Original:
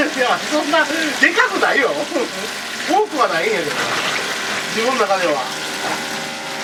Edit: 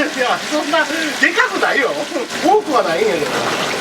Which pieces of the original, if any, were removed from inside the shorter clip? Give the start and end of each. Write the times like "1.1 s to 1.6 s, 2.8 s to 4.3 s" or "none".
2.3 s to 2.8 s